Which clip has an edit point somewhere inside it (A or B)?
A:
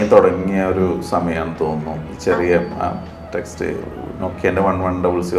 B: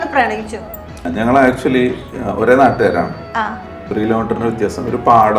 B